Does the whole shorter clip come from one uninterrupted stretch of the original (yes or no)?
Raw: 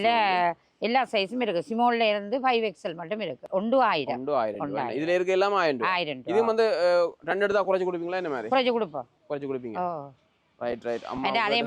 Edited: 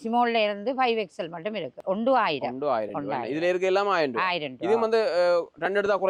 yes